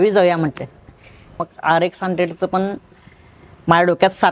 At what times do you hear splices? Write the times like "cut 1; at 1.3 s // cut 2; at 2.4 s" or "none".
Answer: cut 1; at 1.3 s